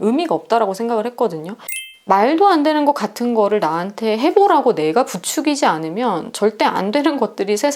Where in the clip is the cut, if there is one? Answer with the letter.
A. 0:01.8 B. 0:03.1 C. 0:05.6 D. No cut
A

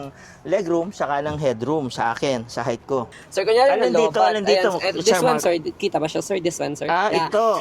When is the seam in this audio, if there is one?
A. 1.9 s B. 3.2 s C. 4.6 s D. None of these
B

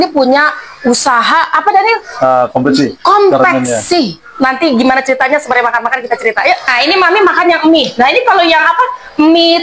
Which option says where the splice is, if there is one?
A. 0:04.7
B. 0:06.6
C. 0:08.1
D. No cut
B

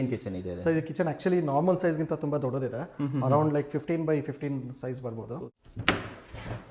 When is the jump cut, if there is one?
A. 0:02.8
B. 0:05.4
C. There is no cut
B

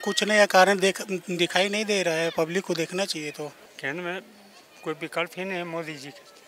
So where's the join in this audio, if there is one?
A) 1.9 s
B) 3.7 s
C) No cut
B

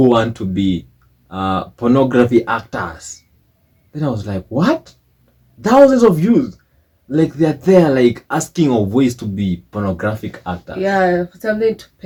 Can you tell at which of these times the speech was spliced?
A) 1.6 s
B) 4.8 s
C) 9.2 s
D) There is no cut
D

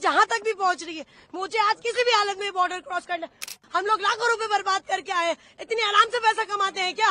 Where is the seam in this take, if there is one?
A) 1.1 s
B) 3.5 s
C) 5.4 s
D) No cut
B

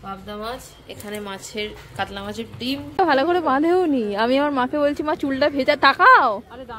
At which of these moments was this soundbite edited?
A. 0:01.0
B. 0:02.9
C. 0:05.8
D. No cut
B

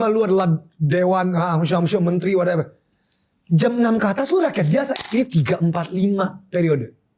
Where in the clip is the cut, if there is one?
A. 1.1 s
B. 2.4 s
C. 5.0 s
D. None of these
C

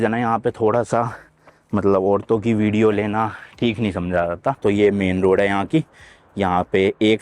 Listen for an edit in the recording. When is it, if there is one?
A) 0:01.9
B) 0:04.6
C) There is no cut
B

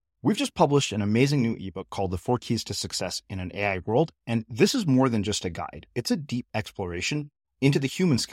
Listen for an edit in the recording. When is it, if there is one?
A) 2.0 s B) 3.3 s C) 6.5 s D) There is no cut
D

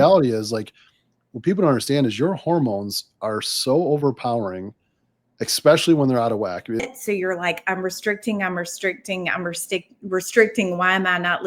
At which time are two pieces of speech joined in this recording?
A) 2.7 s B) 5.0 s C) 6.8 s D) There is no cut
C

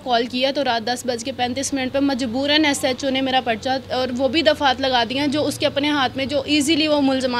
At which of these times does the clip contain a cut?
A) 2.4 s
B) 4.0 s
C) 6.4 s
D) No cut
D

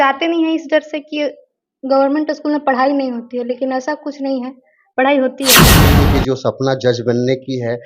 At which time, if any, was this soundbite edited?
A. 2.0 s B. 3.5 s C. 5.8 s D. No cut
C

